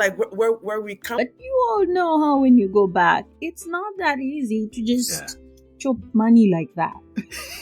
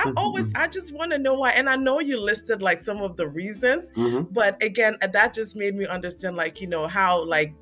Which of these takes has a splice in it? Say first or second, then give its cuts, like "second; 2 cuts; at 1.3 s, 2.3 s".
first; 1 cut; at 1.1 s